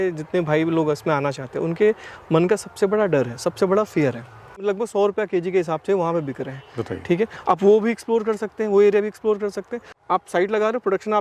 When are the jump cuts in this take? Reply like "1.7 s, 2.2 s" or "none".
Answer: 4.6 s, 9.9 s